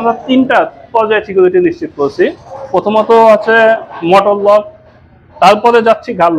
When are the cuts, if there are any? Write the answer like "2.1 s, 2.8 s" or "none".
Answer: none